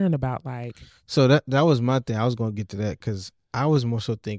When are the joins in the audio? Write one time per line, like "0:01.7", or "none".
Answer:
none